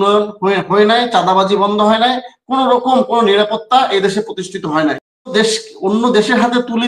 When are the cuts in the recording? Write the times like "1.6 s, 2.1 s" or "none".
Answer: 5.3 s